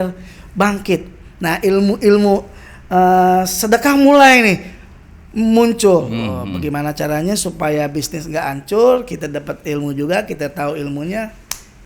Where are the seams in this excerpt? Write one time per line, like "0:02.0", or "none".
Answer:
none